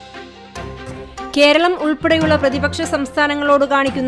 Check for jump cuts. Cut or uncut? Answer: cut